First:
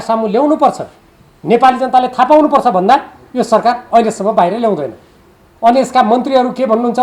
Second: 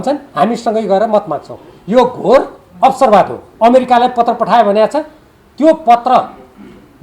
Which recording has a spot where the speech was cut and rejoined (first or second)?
second